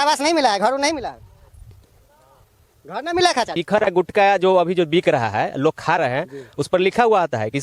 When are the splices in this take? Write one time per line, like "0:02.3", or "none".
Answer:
0:03.6

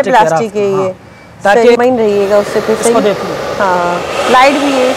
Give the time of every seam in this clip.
0:01.8

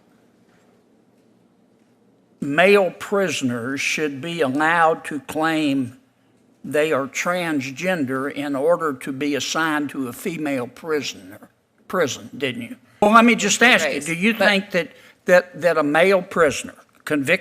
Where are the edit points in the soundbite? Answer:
0:13.1

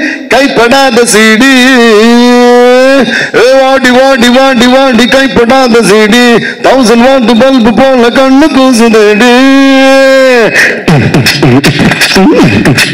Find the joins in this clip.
none

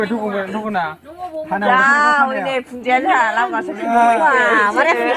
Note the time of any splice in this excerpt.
none

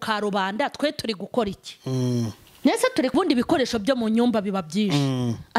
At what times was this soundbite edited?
0:03.1

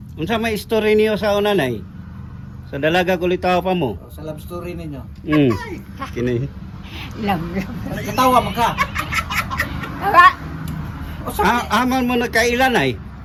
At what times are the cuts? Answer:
none

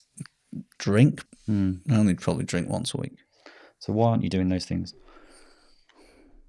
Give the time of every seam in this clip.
0:01.3

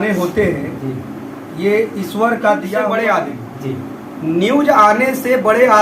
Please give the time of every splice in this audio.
0:02.8

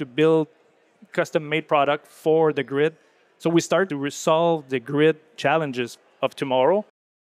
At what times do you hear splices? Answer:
0:01.6
0:03.9
0:05.3

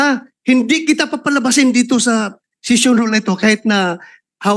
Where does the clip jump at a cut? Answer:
none

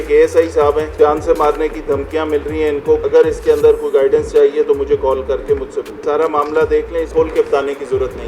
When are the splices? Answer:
0:00.9
0:03.0
0:05.9
0:07.1

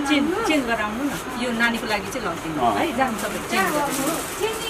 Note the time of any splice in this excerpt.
none

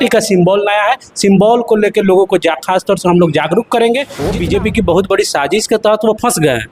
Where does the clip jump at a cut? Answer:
0:04.2

